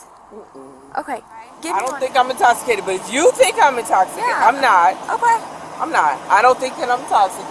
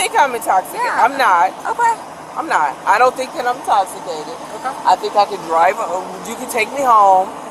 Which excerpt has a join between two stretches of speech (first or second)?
first